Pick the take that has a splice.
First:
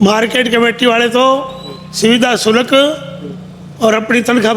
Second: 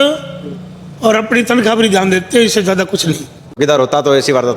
second; 1 cut; at 3.6 s

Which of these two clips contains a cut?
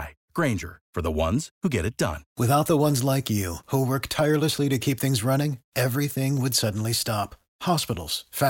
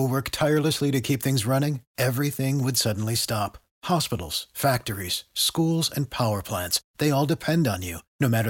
first; 1 cut; at 2.2 s

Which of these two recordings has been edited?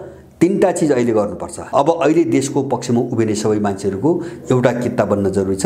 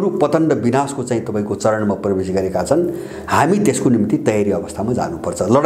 first; 1 cut; at 1.6 s

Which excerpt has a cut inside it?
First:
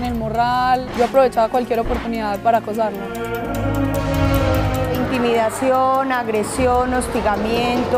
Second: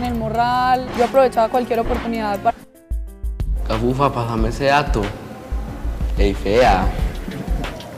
first; 1 cut; at 2.5 s

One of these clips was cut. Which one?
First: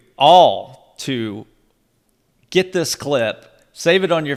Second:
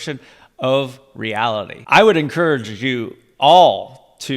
second; 1 cut; at 1.8 s

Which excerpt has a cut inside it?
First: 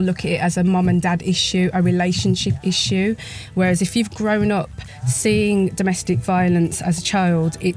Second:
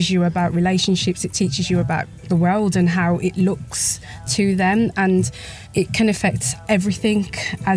second; 4 cuts; at 1.3 s, 2.2 s, 4.3 s, 5.9 s

